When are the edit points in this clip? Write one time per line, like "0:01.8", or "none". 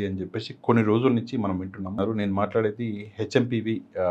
0:01.9